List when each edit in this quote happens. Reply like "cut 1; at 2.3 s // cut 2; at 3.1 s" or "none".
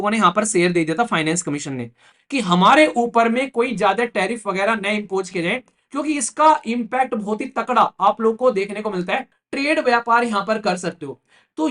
cut 1; at 2.0 s // cut 2; at 9.4 s